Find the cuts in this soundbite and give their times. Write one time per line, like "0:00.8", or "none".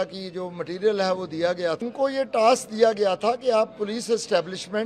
0:01.8